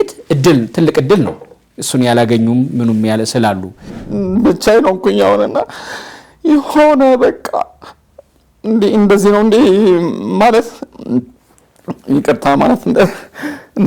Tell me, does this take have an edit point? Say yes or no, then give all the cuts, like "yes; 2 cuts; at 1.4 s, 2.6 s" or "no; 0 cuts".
yes; 1 cut; at 4.0 s